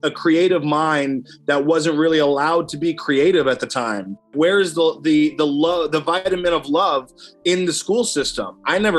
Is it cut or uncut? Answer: cut